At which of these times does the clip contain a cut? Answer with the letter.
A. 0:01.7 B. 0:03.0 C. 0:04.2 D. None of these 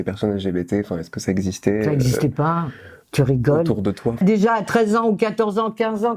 C